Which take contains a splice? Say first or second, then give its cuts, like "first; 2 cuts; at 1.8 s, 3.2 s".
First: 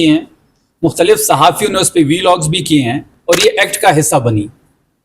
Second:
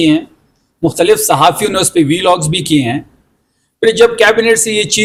first; 1 cut; at 3.1 s